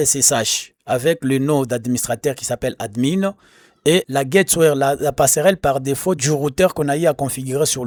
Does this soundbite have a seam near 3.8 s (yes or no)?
no